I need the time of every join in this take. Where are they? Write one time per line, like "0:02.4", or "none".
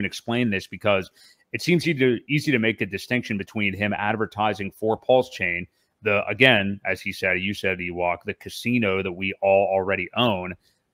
none